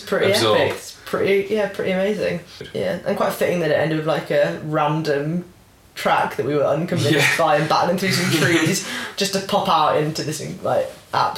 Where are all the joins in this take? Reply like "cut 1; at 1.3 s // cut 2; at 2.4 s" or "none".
cut 1; at 2.6 s